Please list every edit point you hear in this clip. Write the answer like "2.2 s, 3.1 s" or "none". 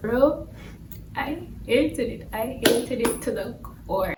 none

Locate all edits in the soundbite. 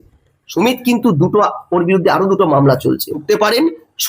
3.1 s

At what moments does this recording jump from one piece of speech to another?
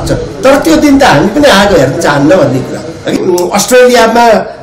3.2 s

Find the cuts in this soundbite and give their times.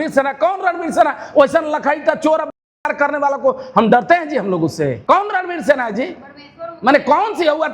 5.0 s

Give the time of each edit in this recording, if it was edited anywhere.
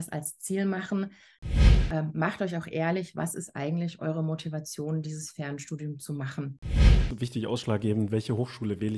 1.7 s, 7.0 s

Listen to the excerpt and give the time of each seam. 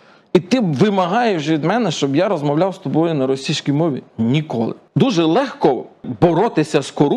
4.8 s, 6.1 s

